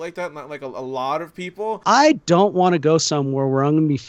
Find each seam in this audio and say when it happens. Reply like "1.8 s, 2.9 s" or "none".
1.8 s